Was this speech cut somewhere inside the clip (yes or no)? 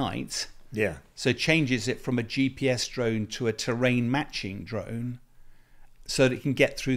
no